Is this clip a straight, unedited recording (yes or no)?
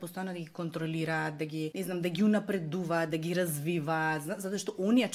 no